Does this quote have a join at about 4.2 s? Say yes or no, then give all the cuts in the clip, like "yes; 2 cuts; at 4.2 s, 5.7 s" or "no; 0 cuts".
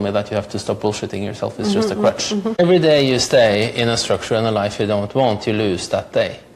no; 1 cut; at 2.6 s